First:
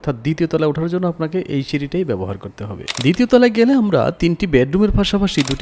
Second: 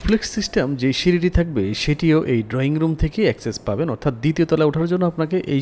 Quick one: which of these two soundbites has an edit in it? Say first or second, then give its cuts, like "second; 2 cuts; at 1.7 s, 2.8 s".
first; 1 cut; at 2.9 s